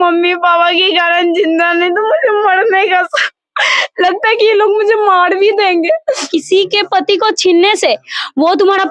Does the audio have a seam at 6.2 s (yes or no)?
yes